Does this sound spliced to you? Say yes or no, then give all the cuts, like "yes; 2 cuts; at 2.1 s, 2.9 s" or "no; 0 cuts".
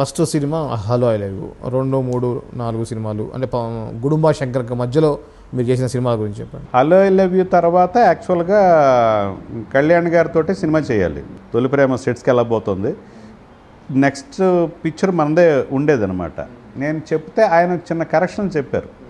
yes; 1 cut; at 11.2 s